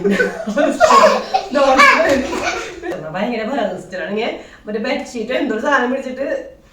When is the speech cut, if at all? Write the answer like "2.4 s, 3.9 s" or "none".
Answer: 2.8 s